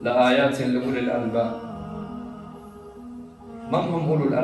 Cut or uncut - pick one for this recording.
cut